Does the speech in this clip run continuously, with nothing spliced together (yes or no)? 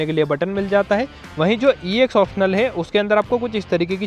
no